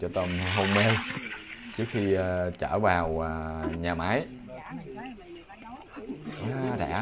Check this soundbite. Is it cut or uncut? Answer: uncut